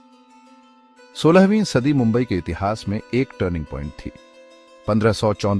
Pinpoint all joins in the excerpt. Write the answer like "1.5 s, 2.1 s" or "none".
1.2 s